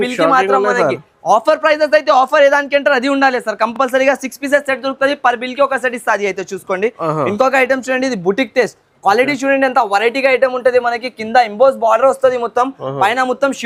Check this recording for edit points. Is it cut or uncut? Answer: uncut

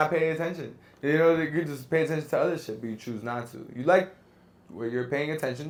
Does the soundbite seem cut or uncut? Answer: uncut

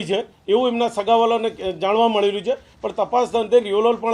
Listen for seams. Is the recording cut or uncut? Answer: uncut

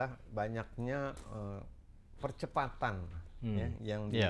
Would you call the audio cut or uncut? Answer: uncut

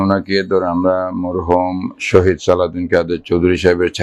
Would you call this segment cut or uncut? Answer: uncut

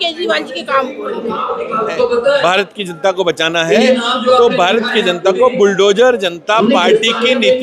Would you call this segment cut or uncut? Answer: cut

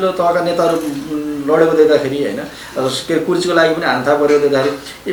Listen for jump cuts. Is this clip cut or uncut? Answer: uncut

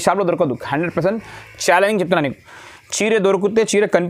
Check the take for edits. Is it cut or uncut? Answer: uncut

